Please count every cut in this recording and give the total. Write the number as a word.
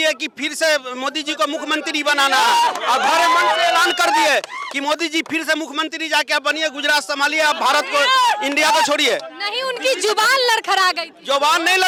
zero